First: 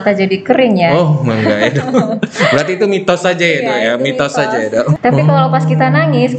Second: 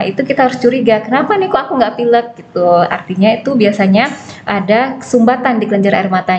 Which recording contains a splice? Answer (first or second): first